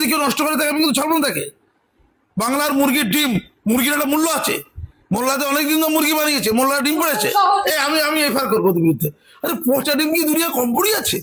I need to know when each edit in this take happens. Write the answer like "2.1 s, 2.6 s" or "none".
none